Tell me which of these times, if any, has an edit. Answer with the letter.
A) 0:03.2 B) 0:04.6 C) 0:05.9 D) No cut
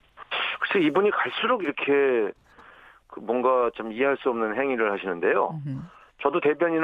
A